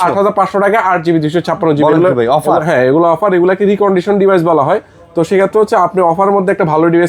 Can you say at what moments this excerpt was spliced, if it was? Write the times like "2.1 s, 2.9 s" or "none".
none